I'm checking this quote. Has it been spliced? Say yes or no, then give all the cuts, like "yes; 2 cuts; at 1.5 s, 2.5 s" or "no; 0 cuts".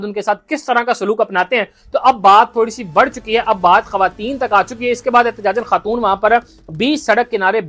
no; 0 cuts